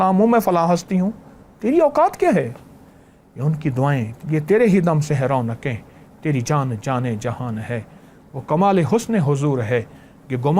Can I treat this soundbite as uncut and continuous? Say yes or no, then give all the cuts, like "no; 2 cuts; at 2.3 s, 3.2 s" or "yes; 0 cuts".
yes; 0 cuts